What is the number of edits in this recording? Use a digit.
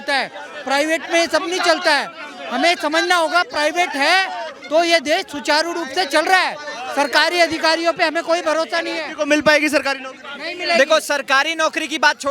0